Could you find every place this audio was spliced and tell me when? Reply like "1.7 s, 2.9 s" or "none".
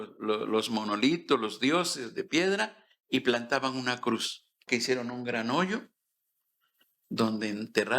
4.6 s